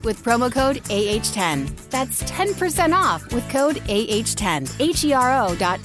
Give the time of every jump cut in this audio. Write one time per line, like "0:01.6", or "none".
0:04.7